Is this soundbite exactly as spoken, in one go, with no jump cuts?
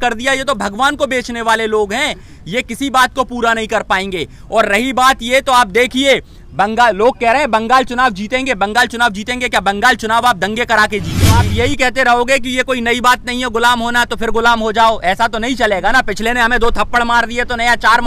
no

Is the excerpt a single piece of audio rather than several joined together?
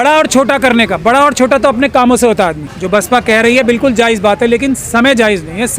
no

